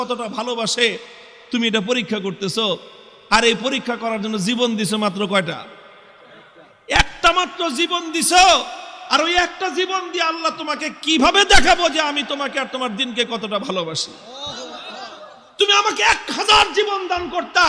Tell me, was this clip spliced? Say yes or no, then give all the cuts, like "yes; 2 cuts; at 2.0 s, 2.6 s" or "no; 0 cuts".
no; 0 cuts